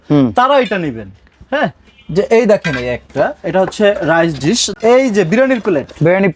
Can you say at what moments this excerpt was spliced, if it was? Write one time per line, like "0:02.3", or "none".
0:04.7